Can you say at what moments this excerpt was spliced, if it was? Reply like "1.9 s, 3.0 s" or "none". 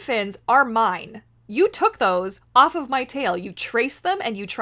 none